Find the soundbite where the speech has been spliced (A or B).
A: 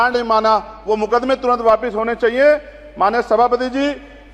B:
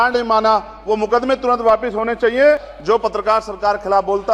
B